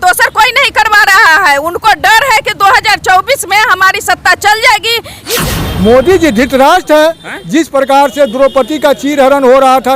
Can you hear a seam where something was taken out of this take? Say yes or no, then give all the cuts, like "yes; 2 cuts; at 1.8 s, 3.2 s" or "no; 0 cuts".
yes; 1 cut; at 5.2 s